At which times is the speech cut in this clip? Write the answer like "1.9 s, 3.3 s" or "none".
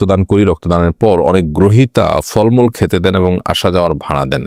none